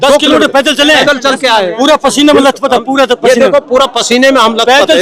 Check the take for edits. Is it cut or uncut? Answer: uncut